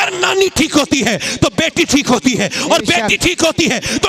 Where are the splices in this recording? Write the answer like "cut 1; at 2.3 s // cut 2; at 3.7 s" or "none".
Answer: none